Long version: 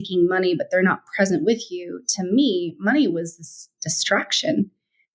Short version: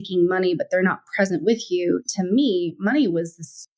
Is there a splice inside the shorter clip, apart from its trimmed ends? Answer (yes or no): no